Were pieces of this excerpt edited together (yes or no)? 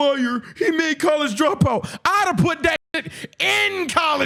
no